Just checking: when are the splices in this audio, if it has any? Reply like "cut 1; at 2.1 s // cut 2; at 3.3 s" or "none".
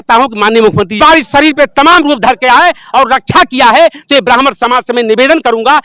cut 1; at 1.0 s